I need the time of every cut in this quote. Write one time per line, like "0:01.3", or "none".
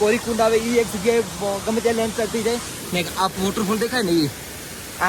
none